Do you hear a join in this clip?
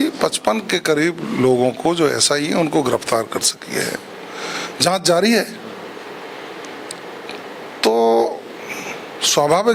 no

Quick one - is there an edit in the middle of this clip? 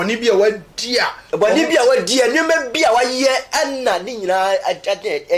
no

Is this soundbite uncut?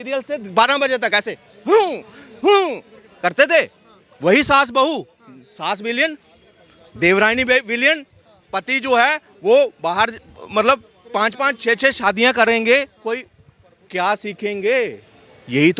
yes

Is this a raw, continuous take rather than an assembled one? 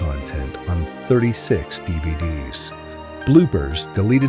no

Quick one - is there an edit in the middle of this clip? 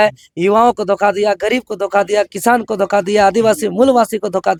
no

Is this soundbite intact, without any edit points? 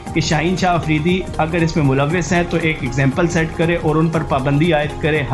yes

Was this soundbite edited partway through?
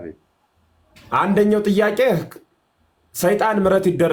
no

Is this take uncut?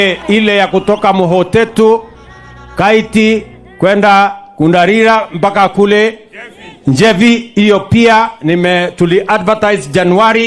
yes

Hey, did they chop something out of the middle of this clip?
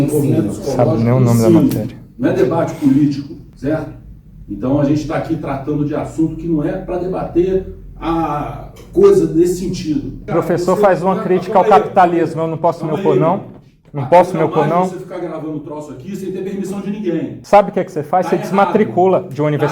yes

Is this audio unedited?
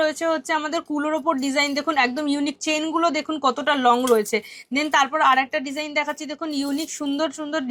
yes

